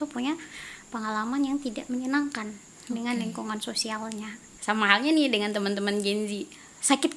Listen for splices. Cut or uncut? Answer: cut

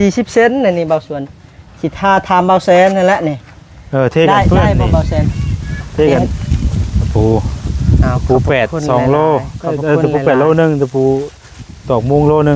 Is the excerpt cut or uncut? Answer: cut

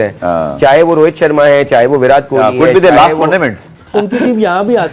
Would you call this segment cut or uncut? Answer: cut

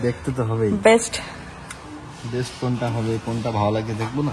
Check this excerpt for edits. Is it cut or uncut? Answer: uncut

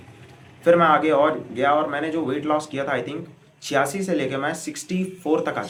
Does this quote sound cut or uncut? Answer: uncut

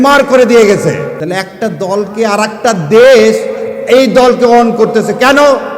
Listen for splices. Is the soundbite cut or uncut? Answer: cut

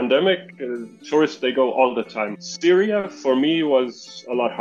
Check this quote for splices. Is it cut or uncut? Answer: uncut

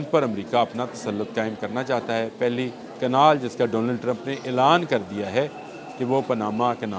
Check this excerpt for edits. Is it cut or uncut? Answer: cut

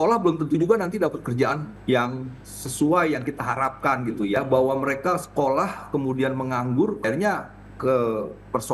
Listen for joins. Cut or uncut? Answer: cut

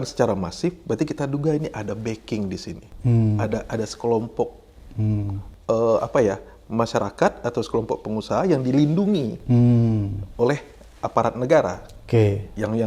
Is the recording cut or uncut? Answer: uncut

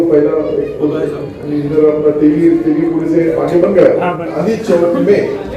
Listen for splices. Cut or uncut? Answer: cut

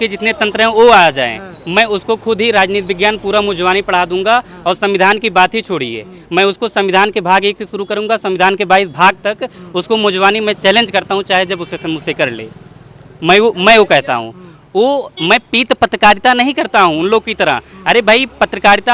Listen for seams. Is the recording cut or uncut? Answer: uncut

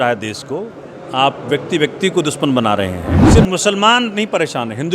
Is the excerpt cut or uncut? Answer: cut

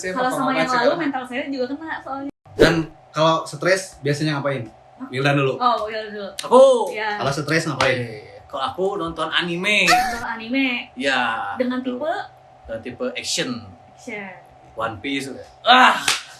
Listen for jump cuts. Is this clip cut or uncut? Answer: cut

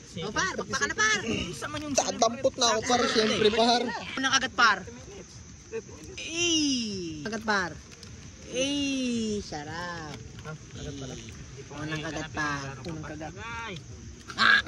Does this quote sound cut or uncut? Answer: cut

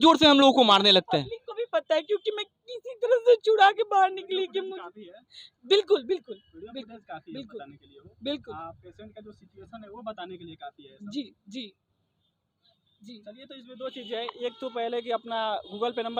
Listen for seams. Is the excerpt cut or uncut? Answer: uncut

